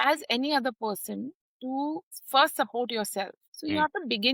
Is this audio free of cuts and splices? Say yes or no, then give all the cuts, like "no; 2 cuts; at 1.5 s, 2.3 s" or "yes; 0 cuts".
yes; 0 cuts